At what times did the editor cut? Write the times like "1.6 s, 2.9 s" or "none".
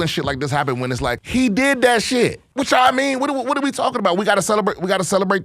1.2 s, 2.4 s